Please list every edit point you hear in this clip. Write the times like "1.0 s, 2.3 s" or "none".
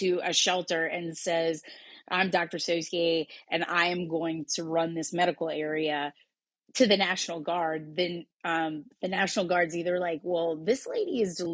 none